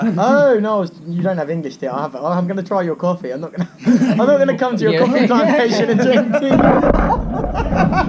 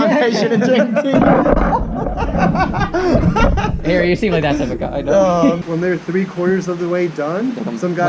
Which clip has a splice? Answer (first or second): second